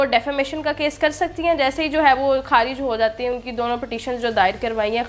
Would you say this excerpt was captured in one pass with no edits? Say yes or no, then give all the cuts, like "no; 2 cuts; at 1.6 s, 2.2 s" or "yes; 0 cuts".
yes; 0 cuts